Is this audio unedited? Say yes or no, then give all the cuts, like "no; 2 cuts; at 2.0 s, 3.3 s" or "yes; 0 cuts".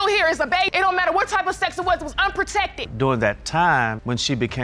no; 1 cut; at 2.8 s